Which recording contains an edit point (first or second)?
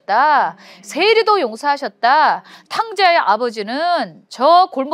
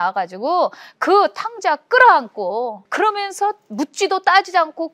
second